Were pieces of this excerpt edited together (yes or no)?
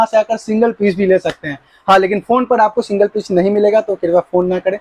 no